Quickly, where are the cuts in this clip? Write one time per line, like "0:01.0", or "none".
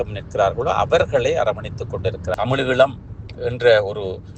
0:02.3